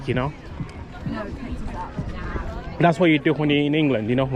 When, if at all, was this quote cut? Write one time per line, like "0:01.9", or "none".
none